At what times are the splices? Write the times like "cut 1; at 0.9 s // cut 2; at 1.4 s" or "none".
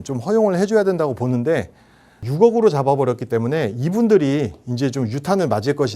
cut 1; at 2.2 s